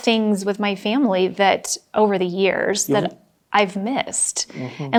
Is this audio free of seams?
yes; 0 cuts

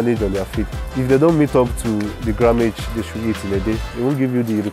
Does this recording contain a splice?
no; 0 cuts

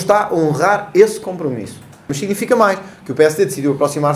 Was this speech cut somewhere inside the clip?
yes; 1 cut; at 2.1 s

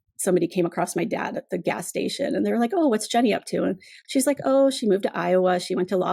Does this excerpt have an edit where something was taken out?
no; 0 cuts

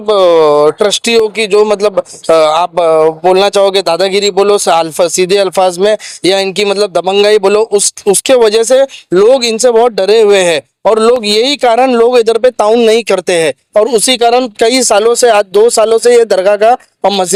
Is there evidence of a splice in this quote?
no; 0 cuts

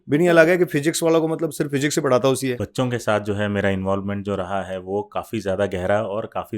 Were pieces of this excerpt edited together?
yes; 1 cut; at 2.6 s

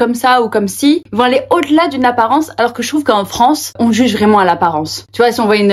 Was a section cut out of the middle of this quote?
yes; 2 cuts; at 1.0 s, 3.7 s

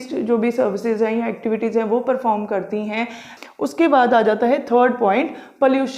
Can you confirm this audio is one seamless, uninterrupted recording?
no; 1 cut; at 3.2 s

